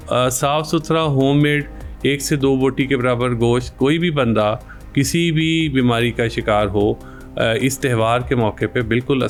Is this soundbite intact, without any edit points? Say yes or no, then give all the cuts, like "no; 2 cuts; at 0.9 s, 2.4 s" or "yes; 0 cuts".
yes; 0 cuts